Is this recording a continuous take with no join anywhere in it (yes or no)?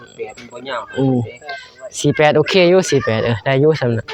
yes